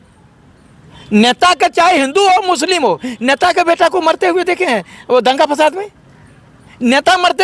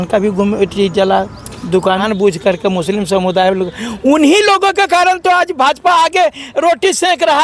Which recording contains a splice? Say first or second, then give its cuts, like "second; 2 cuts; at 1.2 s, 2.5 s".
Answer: second; 1 cut; at 2.0 s